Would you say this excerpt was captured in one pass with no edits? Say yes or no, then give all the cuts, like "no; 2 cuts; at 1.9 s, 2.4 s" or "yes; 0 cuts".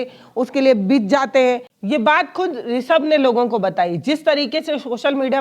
no; 1 cut; at 1.7 s